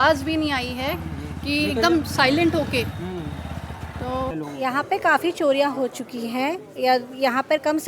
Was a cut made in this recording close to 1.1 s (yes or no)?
no